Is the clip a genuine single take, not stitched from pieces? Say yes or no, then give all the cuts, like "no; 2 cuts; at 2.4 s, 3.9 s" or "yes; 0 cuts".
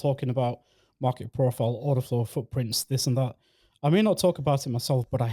yes; 0 cuts